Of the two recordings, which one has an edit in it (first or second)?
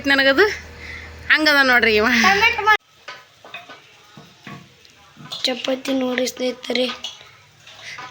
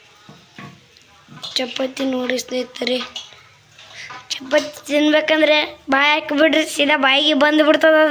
first